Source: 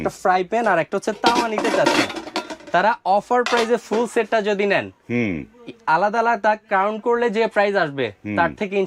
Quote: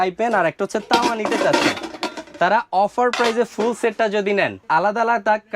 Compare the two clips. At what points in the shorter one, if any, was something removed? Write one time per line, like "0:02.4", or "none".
0:04.6